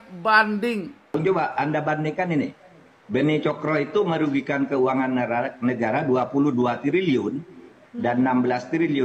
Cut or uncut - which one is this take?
cut